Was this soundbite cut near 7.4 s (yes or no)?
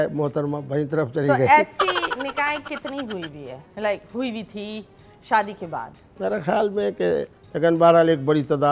yes